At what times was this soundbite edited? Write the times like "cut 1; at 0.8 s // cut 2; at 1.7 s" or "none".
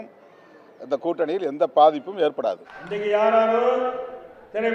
cut 1; at 2.8 s